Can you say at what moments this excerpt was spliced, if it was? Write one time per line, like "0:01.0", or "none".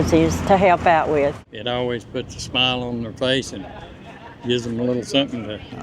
0:01.4